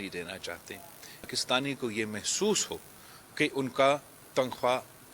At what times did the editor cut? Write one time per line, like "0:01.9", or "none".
0:01.3